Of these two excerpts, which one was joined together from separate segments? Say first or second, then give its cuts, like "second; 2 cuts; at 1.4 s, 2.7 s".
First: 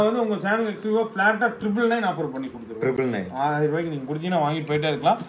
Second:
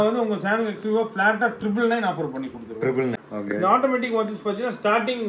second; 1 cut; at 3.2 s